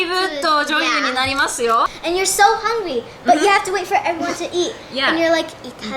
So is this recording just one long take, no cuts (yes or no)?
no